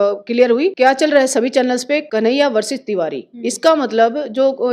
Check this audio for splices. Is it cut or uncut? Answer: cut